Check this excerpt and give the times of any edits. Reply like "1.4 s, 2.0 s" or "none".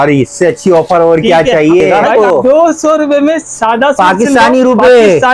2.0 s